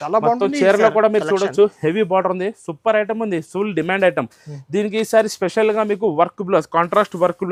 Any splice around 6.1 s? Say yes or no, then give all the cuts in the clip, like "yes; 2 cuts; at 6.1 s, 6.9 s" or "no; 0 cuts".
no; 0 cuts